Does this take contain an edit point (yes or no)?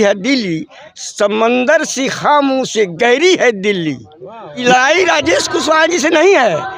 yes